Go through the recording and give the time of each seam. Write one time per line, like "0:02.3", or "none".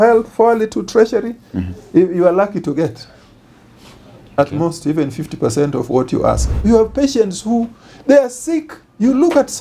0:06.5